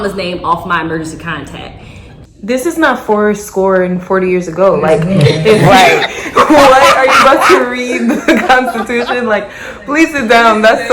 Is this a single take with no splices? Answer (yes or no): no